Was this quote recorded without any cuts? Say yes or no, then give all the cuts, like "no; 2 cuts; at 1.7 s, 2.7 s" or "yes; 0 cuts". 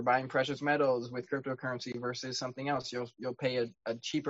yes; 0 cuts